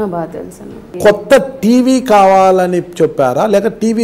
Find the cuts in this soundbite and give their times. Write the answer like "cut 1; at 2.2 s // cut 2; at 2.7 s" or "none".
cut 1; at 0.9 s